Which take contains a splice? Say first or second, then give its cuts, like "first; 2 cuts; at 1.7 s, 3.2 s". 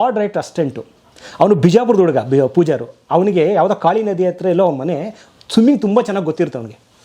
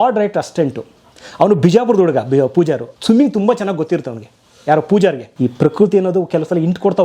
second; 2 cuts; at 2.9 s, 5.3 s